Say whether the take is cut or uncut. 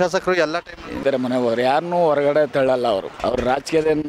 cut